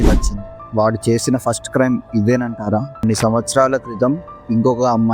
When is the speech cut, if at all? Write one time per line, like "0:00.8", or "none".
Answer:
0:03.0